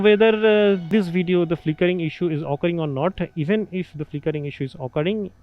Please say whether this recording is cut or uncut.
cut